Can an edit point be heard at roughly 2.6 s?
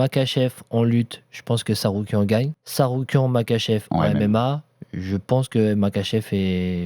yes; 1 cut; at 2.6 s

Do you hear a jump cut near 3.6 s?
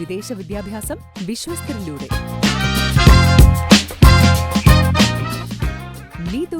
no; 0 cuts

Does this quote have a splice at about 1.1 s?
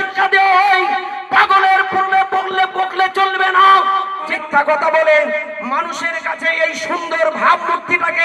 no; 1 cut; at 4.3 s

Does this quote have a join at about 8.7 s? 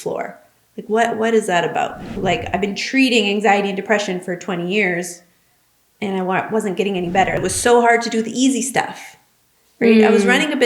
no; 2 cuts; at 2.2 s, 7.4 s

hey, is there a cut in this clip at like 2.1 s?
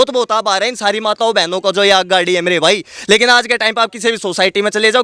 no; 0 cuts

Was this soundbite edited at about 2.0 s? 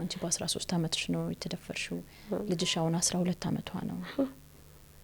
no; 0 cuts

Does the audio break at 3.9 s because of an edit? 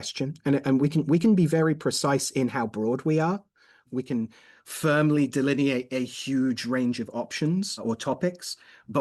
yes; 2 cuts; at 3.9 s, 7.8 s

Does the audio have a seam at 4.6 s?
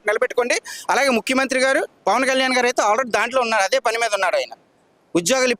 no; 0 cuts

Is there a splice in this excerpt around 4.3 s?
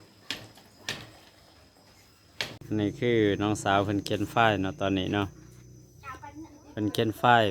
no; 1 cut; at 2.6 s

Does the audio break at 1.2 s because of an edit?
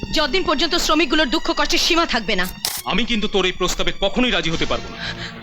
no; 1 cut; at 2.7 s

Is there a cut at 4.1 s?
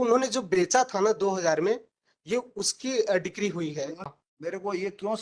yes; 1 cut; at 4.1 s

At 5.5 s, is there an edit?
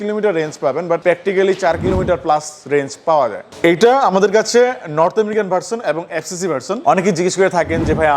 no; 3 cuts; at 1.0 s, 3.4 s, 6.8 s

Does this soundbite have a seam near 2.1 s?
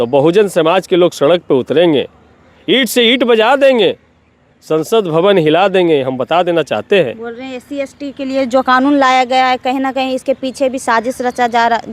no; 0 cuts

